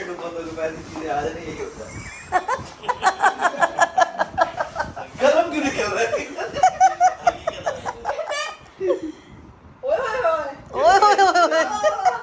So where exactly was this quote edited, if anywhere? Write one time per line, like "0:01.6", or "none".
none